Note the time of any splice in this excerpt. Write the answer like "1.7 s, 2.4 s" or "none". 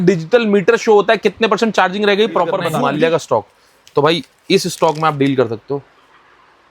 2.7 s